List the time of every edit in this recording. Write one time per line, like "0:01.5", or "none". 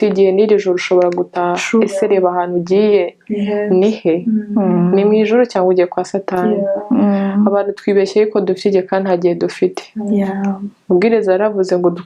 none